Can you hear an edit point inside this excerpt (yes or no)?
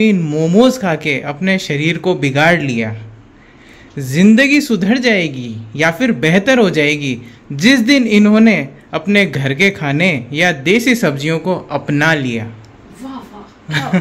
no